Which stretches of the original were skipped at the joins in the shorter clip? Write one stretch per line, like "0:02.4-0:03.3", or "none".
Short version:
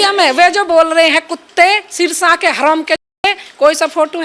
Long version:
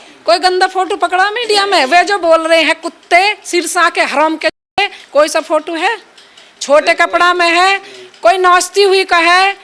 none